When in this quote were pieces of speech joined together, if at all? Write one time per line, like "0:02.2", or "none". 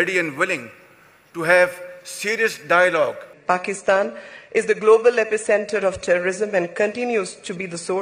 0:03.3